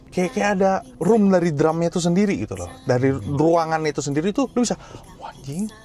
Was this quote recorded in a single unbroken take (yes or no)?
no